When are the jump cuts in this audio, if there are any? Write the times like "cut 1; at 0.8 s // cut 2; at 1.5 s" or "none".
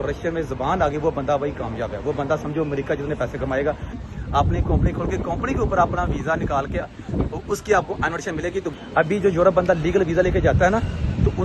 cut 1; at 4.0 s // cut 2; at 8.7 s